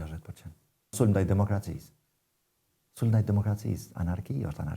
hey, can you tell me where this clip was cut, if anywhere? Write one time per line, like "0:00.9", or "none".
0:00.9